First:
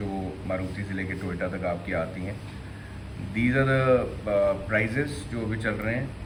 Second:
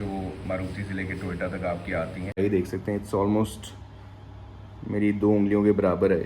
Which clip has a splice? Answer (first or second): second